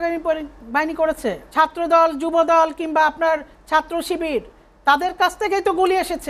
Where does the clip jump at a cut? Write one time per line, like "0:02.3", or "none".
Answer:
0:01.4